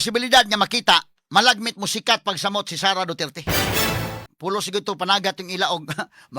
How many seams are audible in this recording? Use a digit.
1